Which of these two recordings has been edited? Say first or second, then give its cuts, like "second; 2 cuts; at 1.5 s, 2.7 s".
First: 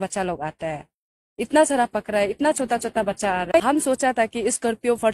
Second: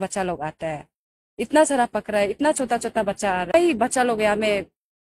first; 1 cut; at 3.6 s